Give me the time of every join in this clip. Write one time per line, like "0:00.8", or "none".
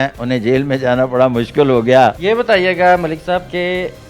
0:02.2

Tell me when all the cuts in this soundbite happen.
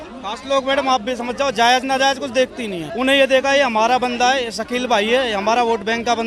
0:02.8

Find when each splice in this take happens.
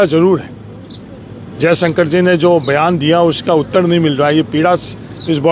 none

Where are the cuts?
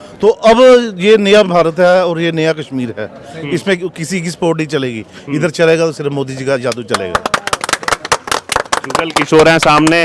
none

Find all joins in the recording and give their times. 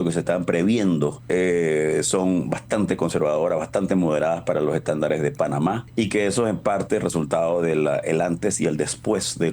0:01.2
0:05.8

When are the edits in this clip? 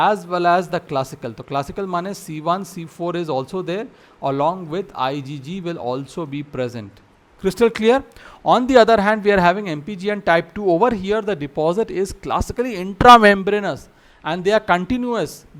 none

